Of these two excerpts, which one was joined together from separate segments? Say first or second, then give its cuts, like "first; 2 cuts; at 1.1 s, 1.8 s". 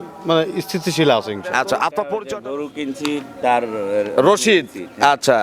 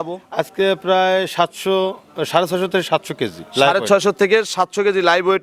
first; 1 cut; at 2.3 s